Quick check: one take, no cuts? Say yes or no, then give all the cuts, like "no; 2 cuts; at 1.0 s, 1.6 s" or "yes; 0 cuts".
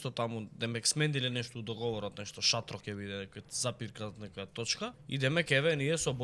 no; 1 cut; at 5.0 s